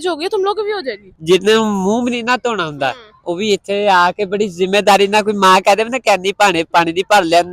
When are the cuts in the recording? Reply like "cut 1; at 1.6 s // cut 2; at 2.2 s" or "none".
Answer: cut 1; at 1.1 s